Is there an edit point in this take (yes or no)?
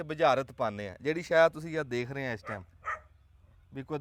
no